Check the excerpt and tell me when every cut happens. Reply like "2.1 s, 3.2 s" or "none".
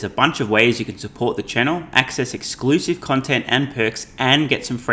none